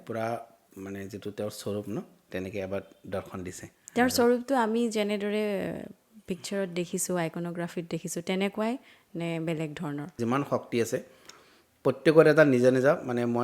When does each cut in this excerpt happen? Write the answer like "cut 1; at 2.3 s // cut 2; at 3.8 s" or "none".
cut 1; at 3.7 s // cut 2; at 10.2 s